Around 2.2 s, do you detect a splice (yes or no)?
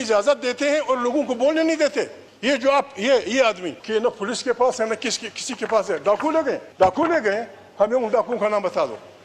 yes